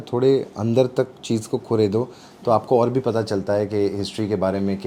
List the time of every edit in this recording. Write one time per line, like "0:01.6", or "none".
none

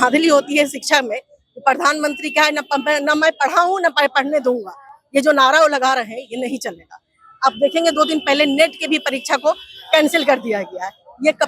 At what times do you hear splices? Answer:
none

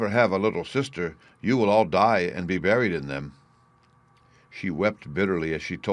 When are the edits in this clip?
0:04.2

